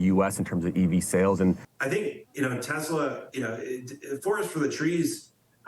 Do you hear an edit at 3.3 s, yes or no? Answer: no